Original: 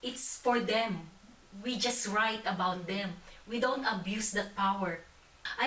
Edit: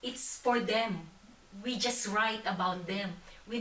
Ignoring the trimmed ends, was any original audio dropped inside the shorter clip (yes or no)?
no